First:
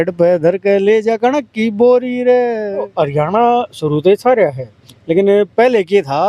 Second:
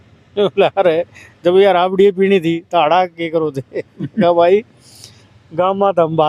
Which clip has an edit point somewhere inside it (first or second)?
first